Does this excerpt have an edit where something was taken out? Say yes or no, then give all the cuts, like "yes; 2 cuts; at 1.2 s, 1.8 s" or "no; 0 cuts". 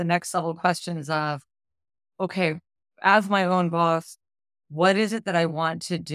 no; 0 cuts